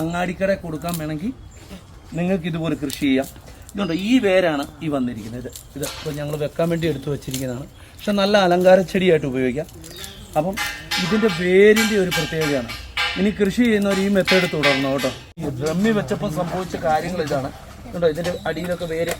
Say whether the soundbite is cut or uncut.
cut